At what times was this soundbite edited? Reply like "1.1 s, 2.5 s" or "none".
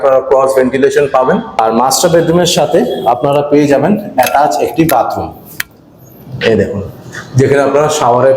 1.5 s